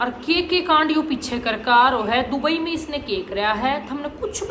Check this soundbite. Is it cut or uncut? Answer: uncut